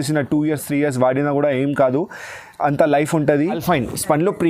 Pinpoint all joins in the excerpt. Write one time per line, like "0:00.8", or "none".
0:03.6